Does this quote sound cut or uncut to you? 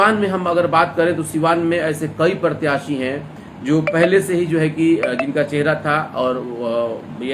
uncut